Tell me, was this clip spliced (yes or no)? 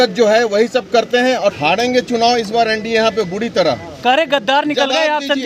yes